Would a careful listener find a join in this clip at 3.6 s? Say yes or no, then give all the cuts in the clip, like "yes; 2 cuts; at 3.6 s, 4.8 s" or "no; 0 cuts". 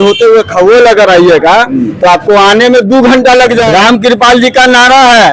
yes; 1 cut; at 3.6 s